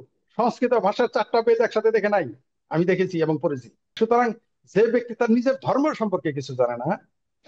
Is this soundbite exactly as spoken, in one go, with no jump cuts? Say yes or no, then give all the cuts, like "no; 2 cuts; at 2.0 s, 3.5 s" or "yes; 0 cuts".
no; 1 cut; at 3.9 s